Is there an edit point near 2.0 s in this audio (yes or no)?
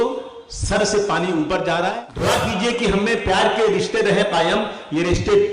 yes